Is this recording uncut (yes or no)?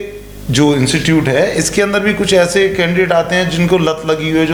yes